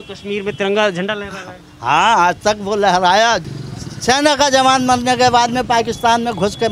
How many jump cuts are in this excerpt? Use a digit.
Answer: 1